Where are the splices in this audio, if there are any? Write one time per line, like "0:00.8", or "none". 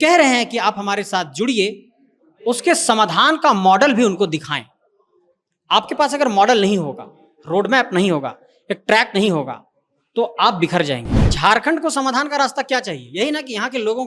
0:11.2